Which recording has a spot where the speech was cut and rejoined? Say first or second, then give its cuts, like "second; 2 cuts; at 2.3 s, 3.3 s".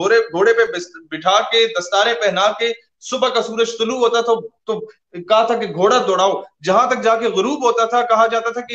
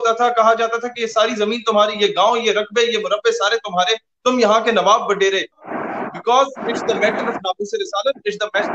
second; 1 cut; at 5.7 s